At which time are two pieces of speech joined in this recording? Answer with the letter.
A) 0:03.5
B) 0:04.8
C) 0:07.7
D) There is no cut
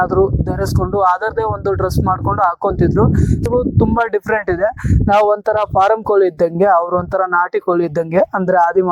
A